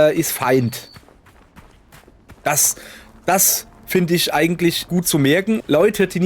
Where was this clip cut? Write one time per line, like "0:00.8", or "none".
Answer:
0:05.2